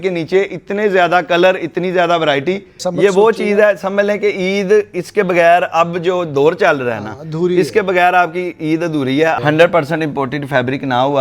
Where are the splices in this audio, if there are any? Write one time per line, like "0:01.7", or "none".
0:02.8
0:09.3

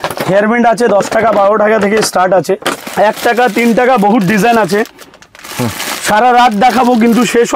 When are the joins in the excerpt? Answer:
0:02.8

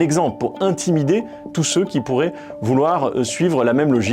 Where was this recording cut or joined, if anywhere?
0:02.0

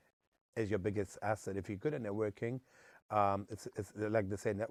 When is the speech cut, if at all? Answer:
none

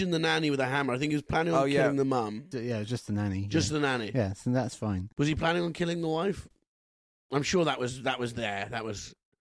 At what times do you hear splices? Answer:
0:02.5

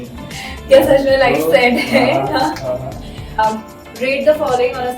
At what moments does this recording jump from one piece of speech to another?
0:03.6

